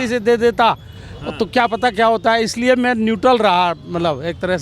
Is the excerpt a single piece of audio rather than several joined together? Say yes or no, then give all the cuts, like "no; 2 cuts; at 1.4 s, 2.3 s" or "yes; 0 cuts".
yes; 0 cuts